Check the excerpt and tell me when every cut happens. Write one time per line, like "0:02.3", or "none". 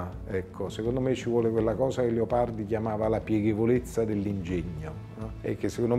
none

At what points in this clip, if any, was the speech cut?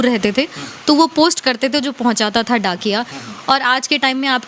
none

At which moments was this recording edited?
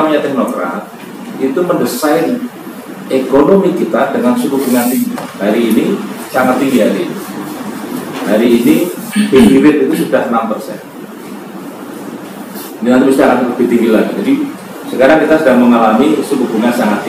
none

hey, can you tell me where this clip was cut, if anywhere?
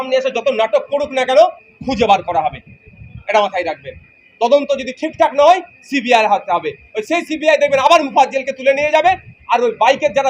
none

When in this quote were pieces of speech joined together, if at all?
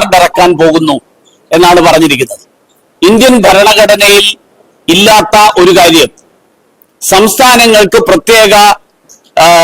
0:02.9

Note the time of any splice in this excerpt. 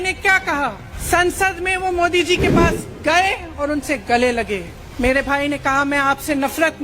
0:00.9
0:04.8

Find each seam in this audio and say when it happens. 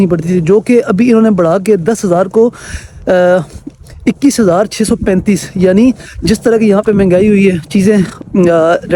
none

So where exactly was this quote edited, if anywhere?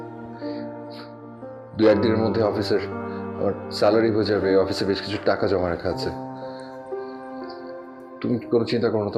none

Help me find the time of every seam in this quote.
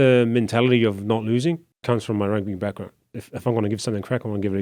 0:01.7
0:03.0

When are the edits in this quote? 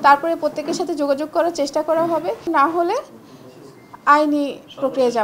0:02.4

